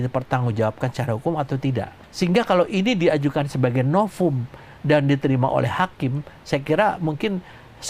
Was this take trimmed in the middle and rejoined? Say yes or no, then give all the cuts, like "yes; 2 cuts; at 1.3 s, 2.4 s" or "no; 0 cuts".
yes; 1 cut; at 2.0 s